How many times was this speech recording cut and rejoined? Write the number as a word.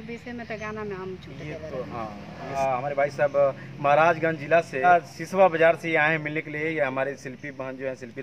two